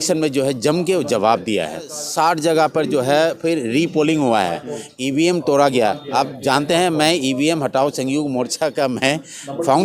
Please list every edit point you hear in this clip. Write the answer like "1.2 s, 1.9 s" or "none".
2.0 s